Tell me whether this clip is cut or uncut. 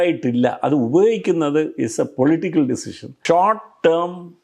cut